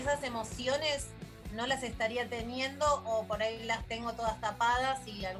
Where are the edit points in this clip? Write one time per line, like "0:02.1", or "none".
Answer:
none